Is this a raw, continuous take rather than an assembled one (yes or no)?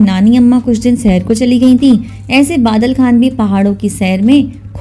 yes